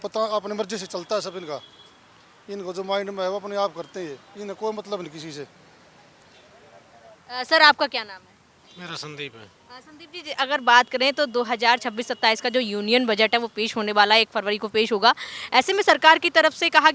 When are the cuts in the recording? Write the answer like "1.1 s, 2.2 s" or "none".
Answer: none

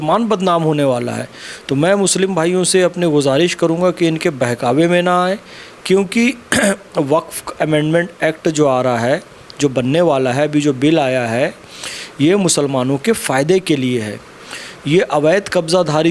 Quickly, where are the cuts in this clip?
none

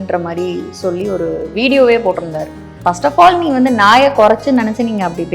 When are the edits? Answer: 2.7 s

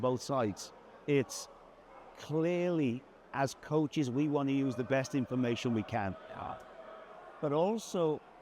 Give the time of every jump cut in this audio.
none

